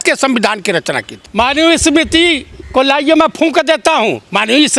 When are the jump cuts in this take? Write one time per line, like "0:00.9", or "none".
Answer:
0:01.2